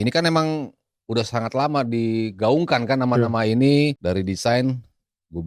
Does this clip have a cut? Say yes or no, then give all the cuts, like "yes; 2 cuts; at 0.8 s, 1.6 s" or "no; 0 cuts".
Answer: yes; 1 cut; at 4.0 s